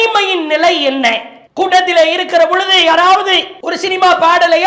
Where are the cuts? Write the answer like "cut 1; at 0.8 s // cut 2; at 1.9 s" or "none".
none